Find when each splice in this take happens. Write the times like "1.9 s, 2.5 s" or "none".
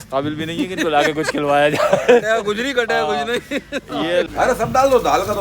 4.3 s